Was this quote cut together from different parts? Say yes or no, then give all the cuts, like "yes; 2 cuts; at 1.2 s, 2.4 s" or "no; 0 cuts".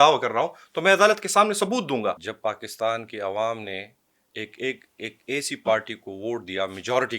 yes; 1 cut; at 2.3 s